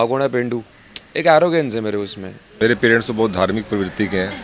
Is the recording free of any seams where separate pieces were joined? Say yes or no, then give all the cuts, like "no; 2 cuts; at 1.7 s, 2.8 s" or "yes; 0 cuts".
no; 1 cut; at 2.5 s